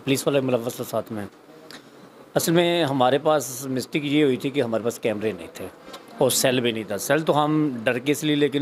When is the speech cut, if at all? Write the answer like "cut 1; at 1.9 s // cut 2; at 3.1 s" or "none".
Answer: none